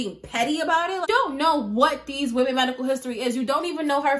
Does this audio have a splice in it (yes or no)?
yes